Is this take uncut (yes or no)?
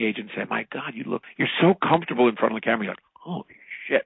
yes